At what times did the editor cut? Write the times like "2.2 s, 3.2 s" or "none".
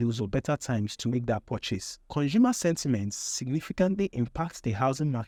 none

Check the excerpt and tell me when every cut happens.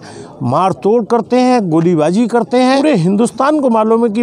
2.8 s

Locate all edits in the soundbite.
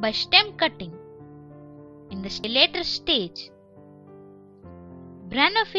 2.4 s

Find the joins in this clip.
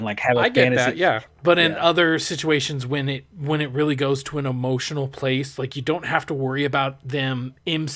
1.3 s

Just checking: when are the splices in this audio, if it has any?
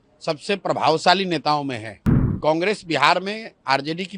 2.3 s

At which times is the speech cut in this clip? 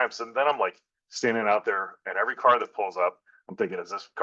none

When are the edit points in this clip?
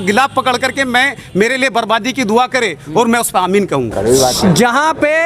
3.9 s

